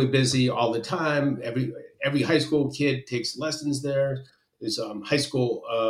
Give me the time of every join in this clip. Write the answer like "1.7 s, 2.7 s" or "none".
none